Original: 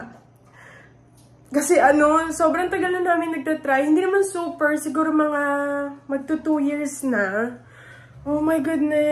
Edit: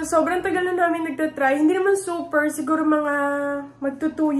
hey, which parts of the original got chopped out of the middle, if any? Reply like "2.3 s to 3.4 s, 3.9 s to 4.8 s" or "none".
none